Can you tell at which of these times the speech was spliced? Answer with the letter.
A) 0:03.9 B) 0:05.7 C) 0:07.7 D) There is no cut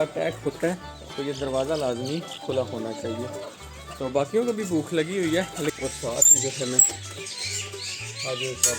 B